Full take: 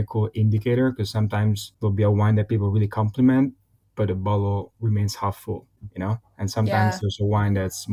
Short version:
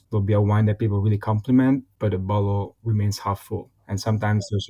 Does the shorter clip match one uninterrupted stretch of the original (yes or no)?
no